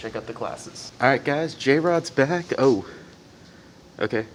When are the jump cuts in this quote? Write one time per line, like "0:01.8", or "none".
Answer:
none